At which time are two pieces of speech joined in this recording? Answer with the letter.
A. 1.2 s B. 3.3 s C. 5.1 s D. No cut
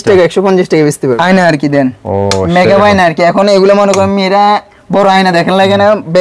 A